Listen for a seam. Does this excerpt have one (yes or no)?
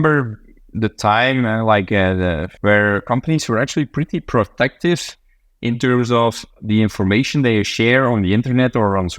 yes